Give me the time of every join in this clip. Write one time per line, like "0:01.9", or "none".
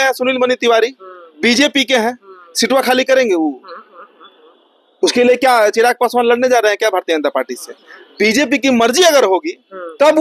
none